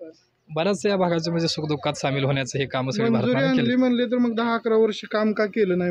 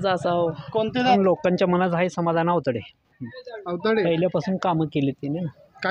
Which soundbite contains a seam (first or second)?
second